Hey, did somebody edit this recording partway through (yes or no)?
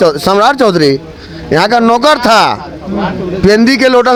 no